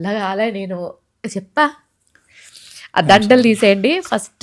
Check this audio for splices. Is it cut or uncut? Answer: uncut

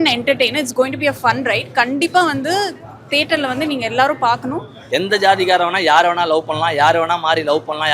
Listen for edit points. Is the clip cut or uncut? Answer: cut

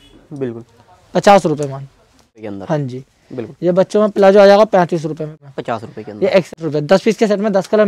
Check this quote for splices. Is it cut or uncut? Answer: cut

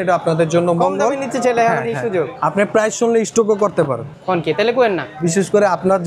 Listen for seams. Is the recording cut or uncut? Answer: cut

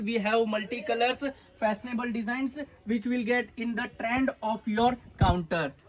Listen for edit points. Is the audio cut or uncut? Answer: uncut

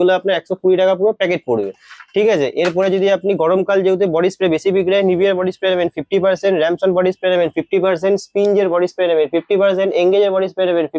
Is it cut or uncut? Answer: uncut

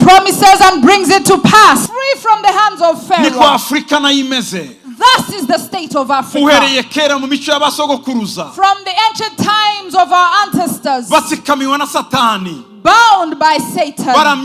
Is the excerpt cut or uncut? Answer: cut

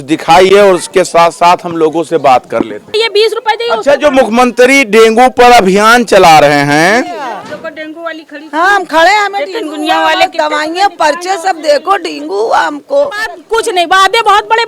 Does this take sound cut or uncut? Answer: cut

